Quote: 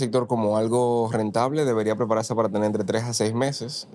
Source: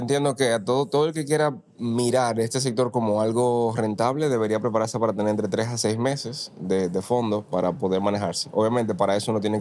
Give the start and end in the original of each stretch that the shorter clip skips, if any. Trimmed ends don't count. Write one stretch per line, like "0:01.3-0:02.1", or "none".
none